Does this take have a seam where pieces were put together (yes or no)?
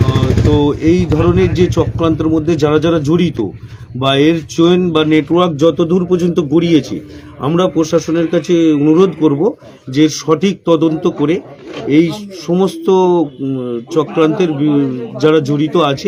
no